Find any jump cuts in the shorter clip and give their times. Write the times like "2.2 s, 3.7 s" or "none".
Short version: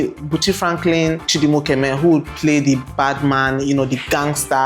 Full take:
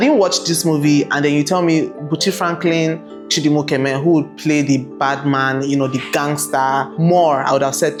1.3 s